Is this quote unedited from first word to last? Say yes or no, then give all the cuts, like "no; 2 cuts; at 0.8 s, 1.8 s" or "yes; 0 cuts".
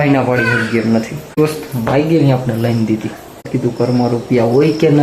no; 2 cuts; at 1.4 s, 3.5 s